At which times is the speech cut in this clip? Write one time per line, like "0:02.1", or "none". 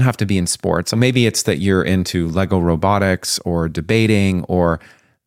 0:00.9